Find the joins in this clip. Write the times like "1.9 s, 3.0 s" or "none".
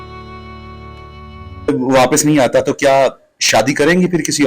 1.7 s